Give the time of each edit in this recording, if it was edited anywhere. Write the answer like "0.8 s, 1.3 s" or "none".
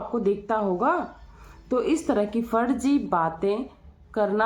none